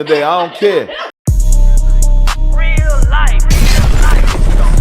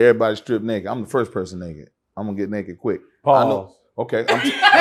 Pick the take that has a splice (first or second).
first